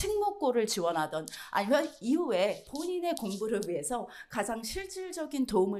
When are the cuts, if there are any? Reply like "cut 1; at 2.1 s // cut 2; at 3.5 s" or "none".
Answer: none